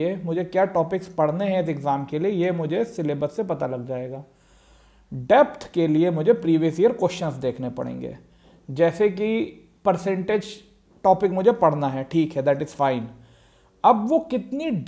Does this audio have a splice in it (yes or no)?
no